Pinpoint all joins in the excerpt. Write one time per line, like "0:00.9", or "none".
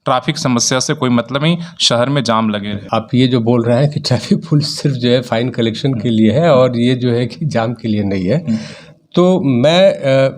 0:02.8